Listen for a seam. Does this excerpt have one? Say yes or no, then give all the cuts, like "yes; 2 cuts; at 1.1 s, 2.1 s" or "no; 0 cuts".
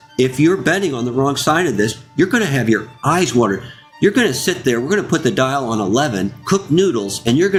no; 0 cuts